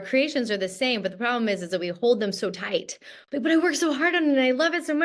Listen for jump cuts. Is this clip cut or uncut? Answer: uncut